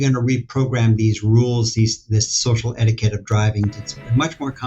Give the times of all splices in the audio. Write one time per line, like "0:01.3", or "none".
0:03.8